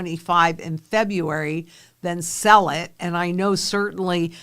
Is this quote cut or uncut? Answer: uncut